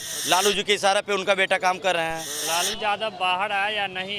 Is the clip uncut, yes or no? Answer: no